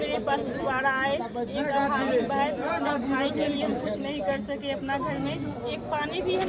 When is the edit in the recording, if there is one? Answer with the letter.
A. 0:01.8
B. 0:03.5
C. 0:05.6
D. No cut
D